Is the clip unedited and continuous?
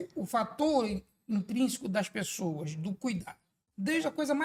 yes; 0 cuts

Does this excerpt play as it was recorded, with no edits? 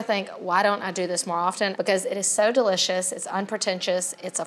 no; 1 cut; at 1.7 s

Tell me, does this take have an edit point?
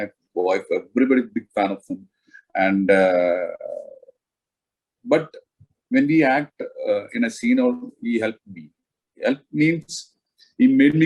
no; 0 cuts

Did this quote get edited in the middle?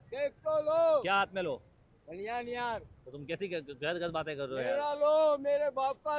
no; 0 cuts

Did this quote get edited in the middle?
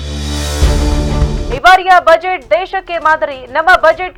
no; 0 cuts

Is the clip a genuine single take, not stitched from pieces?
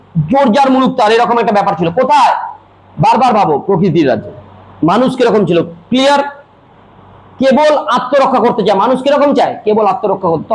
yes; 0 cuts

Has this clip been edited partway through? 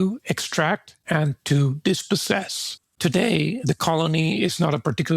yes; 2 cuts; at 0.9 s, 2.8 s

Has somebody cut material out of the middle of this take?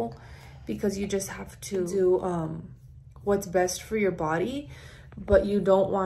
yes; 1 cut; at 1.9 s

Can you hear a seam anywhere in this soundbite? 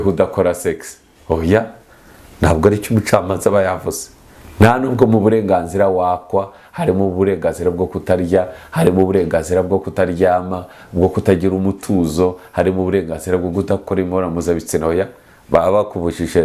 no; 0 cuts

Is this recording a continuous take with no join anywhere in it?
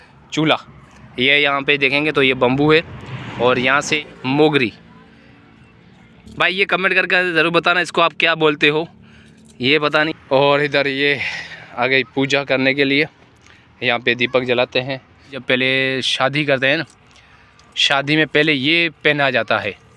no; 3 cuts; at 3.9 s, 10.1 s, 15.4 s

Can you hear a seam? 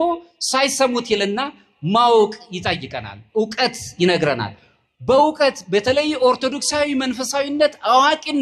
no; 0 cuts

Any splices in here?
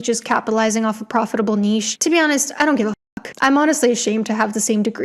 no; 0 cuts

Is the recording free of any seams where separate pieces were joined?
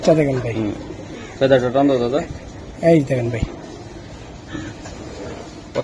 yes; 0 cuts

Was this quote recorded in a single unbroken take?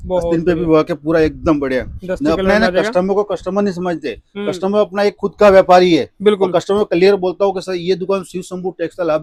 yes; 0 cuts

